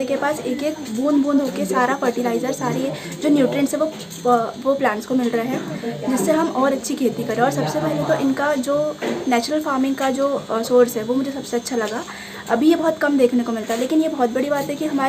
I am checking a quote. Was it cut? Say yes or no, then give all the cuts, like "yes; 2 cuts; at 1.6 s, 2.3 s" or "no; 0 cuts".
no; 0 cuts